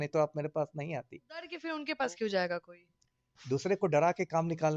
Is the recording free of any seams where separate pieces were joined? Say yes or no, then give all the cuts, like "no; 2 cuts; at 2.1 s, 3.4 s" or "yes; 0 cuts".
no; 1 cut; at 1.7 s